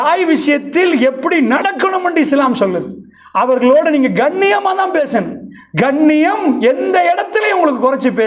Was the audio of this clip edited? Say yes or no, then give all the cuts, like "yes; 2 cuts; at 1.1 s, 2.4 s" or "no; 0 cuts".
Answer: yes; 1 cut; at 4.5 s